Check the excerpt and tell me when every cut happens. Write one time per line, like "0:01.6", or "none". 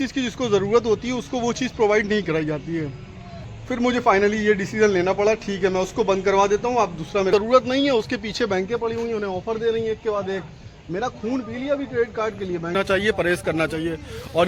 0:03.5
0:07.3
0:12.7